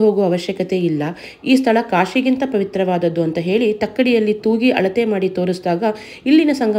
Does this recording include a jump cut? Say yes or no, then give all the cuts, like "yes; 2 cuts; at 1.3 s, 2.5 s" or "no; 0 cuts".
no; 0 cuts